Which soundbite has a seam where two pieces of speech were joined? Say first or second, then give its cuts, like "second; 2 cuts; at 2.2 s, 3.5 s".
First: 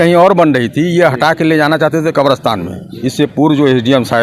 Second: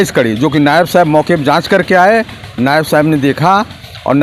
first; 1 cut; at 3.0 s